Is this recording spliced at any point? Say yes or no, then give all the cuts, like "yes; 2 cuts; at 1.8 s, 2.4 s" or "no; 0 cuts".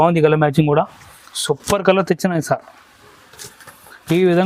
no; 0 cuts